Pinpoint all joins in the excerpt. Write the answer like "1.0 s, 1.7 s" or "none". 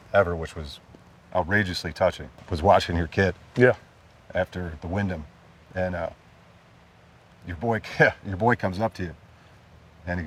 none